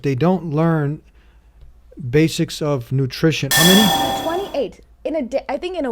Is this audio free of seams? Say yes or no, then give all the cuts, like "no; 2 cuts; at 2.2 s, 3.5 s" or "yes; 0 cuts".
no; 1 cut; at 3.4 s